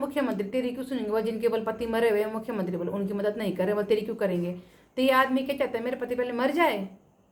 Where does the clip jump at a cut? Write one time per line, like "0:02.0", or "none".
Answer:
none